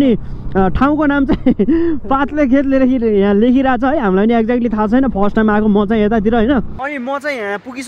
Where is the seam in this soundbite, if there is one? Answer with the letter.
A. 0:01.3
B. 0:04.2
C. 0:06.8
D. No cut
C